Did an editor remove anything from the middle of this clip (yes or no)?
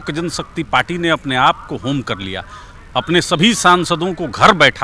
no